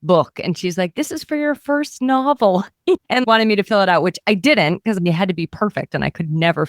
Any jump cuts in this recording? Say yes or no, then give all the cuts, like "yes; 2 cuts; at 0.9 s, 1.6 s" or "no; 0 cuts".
yes; 2 cuts; at 3.0 s, 5.0 s